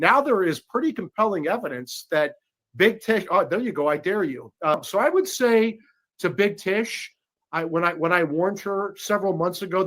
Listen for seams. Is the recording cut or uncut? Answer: cut